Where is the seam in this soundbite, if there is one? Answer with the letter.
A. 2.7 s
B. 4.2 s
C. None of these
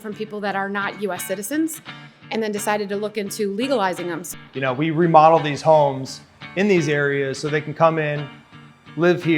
B